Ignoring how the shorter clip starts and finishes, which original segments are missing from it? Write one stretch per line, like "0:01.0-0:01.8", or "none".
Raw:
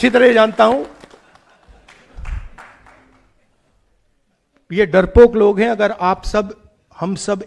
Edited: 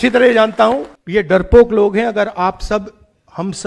0:00.9-0:04.6